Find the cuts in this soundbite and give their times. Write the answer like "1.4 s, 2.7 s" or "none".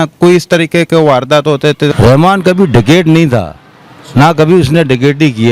1.9 s